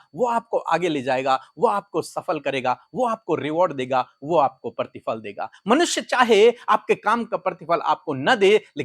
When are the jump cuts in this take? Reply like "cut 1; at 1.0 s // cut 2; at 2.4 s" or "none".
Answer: none